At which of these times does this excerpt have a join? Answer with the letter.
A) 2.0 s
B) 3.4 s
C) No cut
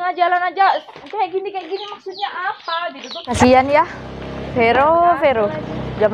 B